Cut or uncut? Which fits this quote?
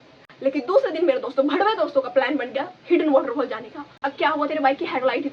cut